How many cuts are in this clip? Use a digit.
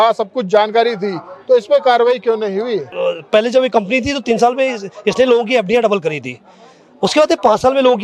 1